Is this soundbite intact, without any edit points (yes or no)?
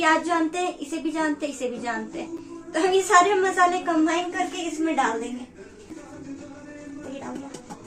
yes